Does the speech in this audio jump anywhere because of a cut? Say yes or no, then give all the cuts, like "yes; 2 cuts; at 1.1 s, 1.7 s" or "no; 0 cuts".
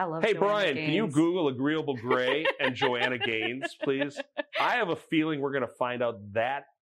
no; 0 cuts